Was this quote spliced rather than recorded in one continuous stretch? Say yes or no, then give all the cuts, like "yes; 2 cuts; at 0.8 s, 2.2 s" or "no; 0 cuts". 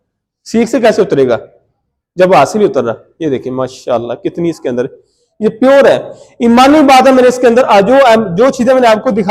no; 0 cuts